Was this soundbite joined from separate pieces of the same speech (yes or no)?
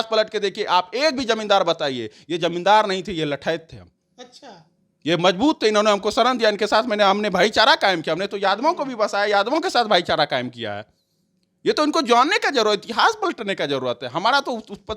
no